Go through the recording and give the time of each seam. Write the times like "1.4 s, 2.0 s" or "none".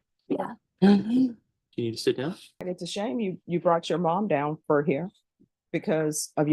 2.6 s